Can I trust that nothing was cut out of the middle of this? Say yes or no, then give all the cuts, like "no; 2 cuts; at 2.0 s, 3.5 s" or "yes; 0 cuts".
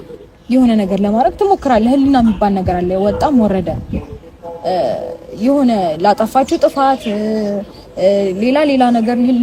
yes; 0 cuts